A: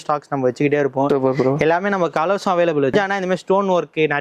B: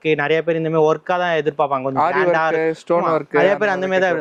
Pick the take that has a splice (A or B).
A